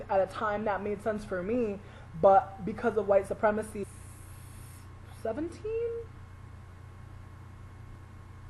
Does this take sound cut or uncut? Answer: uncut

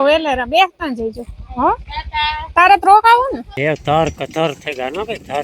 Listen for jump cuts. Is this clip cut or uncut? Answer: cut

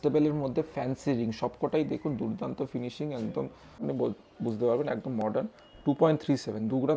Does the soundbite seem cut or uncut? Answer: cut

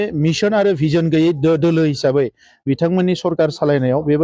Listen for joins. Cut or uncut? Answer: uncut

